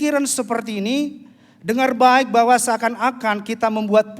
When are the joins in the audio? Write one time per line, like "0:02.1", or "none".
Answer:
none

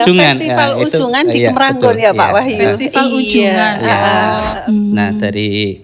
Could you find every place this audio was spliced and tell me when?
0:04.5

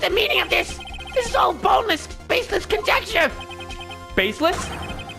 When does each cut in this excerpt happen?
none

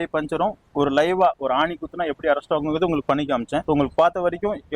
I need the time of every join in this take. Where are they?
0:03.6

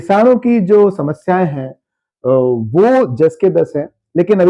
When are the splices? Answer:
none

